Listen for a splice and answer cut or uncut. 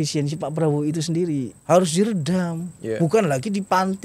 cut